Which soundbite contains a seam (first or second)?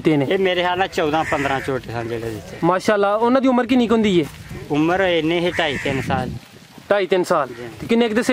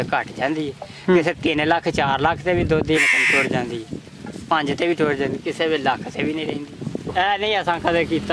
second